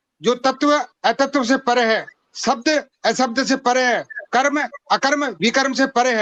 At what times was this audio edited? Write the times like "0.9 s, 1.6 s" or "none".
none